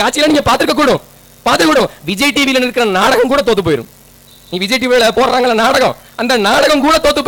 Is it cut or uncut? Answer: uncut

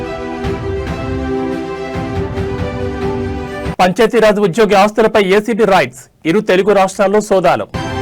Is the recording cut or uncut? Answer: uncut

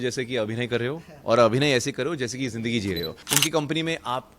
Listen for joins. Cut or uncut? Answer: cut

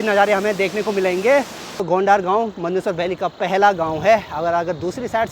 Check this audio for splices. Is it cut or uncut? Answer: cut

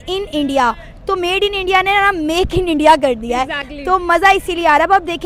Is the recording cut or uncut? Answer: uncut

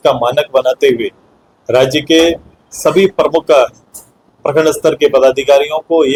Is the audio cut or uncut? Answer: uncut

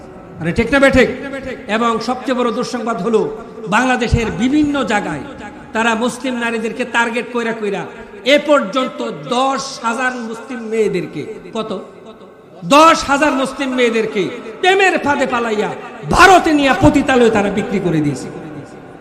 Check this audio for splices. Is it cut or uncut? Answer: uncut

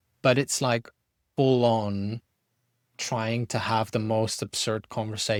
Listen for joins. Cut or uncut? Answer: uncut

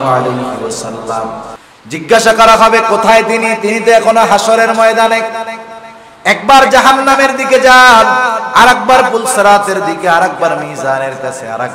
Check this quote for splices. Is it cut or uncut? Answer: cut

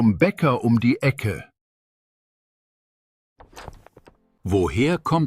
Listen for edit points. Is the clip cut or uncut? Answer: cut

